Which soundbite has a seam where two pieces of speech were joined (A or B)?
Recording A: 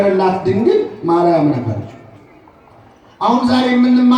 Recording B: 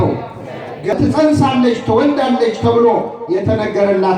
B